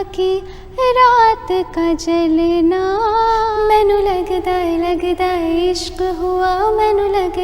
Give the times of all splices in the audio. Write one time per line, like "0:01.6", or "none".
0:03.5

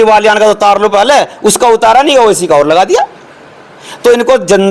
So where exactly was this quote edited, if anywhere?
none

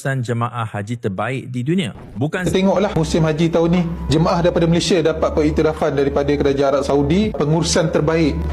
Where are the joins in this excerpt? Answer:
0:02.5

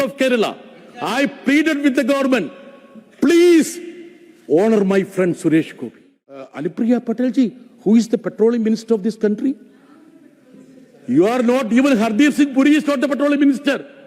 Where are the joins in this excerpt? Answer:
0:06.5

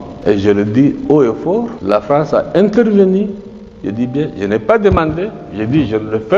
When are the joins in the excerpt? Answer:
none

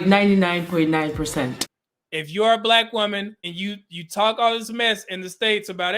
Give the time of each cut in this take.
0:01.6
0:03.4

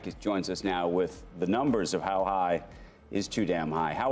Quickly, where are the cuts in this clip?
none

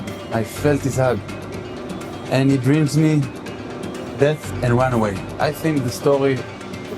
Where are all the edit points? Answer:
0:04.5
0:05.4

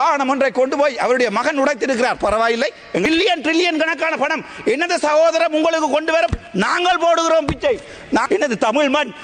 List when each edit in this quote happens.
0:03.1
0:08.2

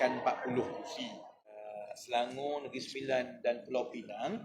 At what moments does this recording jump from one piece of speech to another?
0:01.7

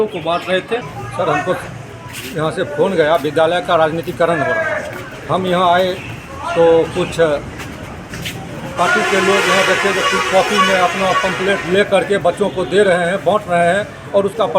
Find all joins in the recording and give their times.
0:01.0

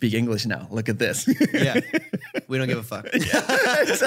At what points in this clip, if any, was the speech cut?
none

